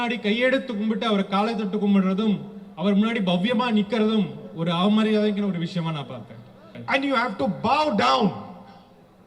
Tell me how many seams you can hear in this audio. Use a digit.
1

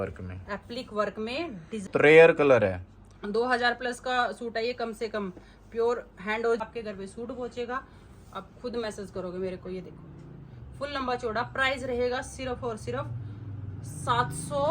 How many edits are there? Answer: 2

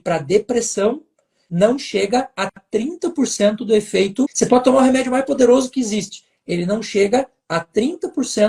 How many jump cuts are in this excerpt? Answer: 1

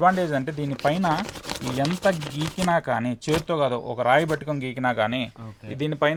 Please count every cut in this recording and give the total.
0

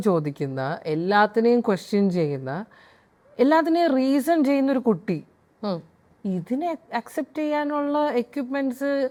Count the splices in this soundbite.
0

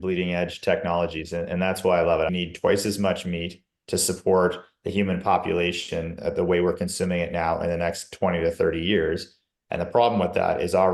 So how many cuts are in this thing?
1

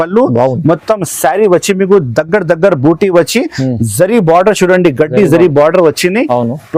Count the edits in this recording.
0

